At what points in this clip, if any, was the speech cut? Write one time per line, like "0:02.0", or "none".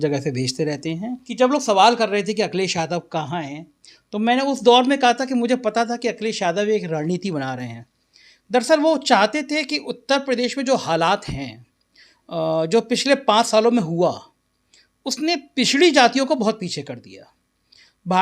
0:01.2